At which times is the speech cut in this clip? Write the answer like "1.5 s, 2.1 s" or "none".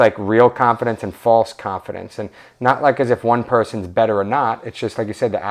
none